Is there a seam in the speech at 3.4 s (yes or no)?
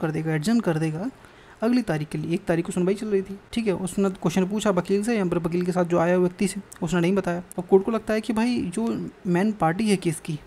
yes